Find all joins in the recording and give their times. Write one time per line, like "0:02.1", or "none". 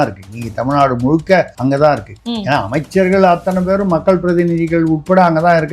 0:01.5
0:02.2